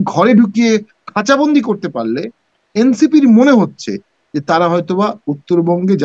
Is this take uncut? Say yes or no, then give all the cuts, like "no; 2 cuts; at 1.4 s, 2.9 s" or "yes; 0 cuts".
yes; 0 cuts